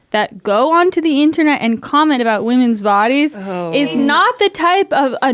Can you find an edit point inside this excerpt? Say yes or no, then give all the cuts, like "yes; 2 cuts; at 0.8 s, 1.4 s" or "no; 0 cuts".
yes; 1 cut; at 4.0 s